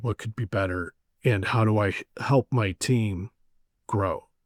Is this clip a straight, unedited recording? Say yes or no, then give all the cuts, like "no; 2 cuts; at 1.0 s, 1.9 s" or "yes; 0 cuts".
yes; 0 cuts